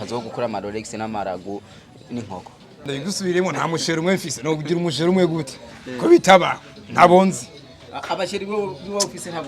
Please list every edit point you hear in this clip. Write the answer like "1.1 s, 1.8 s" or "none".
2.9 s